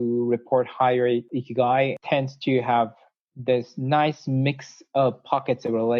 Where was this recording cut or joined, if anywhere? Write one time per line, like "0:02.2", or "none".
0:01.3
0:02.0